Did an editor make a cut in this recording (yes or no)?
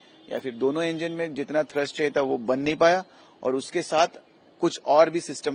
no